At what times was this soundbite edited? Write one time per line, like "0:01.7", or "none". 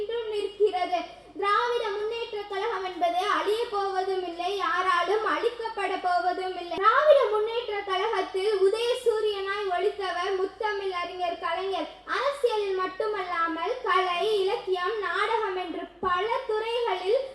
0:06.8